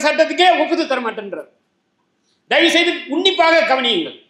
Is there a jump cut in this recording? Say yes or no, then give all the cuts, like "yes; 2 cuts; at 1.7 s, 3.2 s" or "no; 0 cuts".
no; 0 cuts